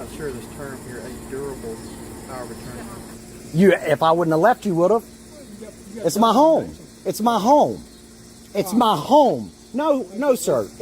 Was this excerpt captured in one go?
no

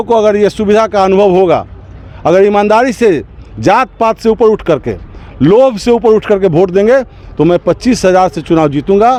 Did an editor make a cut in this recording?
no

